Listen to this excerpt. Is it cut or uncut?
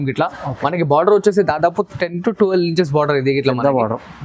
uncut